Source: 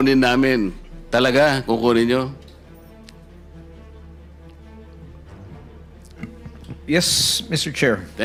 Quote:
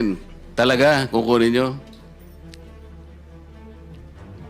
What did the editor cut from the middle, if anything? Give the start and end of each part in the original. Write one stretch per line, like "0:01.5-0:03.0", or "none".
0:02.4-0:02.9